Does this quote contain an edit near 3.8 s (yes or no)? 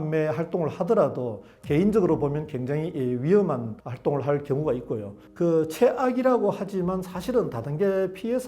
no